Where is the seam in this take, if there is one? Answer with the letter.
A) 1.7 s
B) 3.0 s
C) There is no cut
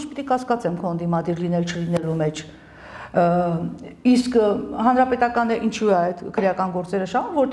C